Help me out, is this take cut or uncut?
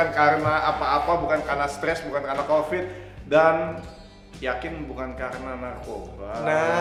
uncut